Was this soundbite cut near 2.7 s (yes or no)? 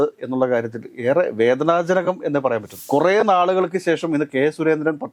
yes